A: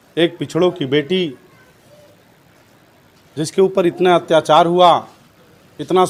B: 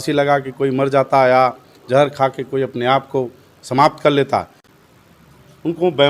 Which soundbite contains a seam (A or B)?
B